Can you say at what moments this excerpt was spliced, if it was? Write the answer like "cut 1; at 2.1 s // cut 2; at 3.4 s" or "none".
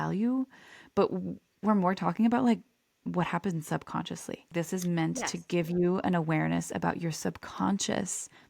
cut 1; at 4.5 s